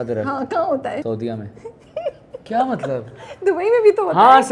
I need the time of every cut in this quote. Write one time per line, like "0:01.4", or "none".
0:01.0
0:02.5